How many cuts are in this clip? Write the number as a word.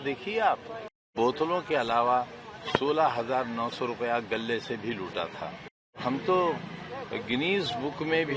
two